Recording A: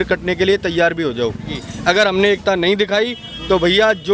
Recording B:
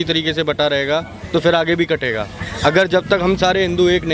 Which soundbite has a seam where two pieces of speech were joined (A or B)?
A